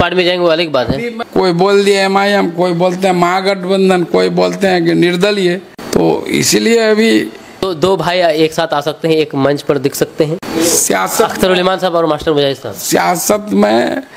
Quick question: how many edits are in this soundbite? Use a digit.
4